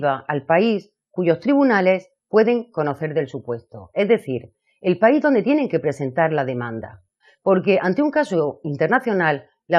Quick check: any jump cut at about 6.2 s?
no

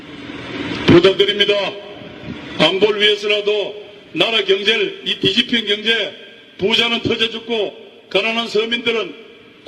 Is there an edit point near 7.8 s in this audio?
no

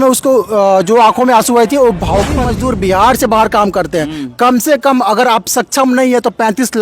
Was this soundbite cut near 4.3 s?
no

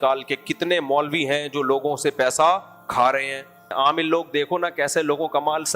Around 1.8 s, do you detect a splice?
no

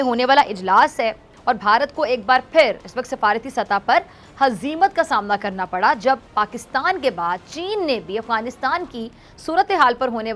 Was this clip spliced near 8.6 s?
no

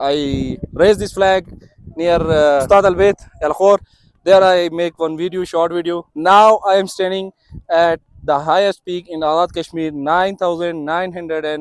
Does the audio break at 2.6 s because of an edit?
yes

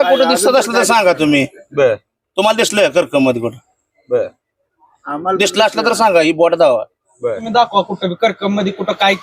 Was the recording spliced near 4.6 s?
no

